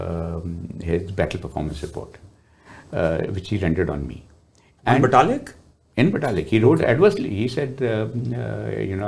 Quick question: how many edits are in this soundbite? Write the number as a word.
zero